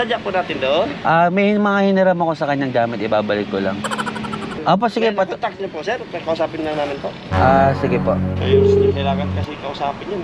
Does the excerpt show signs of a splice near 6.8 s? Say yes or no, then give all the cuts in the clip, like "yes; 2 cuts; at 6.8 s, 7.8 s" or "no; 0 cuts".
no; 1 cut; at 4.6 s